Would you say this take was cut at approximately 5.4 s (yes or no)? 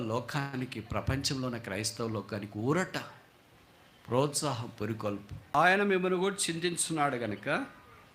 yes